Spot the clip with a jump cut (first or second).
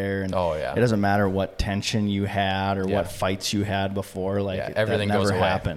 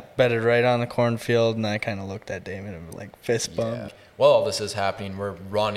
second